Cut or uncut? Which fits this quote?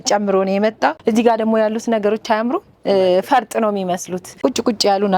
cut